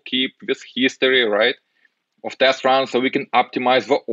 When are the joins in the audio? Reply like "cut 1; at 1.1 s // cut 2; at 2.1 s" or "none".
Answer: none